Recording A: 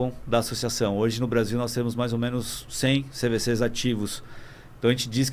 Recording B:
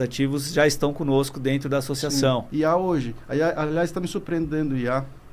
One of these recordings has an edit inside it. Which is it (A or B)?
B